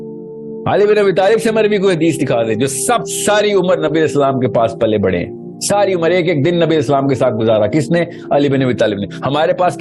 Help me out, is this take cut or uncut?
uncut